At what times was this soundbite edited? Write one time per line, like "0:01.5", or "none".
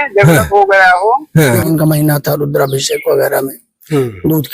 0:01.6